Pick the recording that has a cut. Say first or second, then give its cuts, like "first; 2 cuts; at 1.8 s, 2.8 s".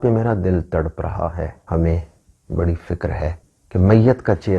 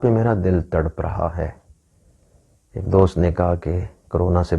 first; 2 cuts; at 1.6 s, 3.5 s